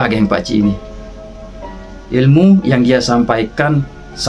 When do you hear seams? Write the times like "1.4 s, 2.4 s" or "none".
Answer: none